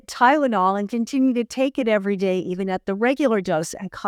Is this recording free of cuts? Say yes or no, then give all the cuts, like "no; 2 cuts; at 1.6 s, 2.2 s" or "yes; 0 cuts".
yes; 0 cuts